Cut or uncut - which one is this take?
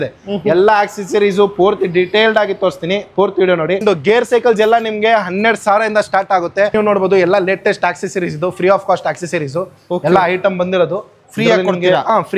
cut